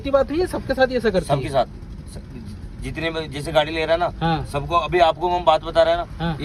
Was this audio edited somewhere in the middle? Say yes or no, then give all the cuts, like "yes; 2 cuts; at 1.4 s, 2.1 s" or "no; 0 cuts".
no; 0 cuts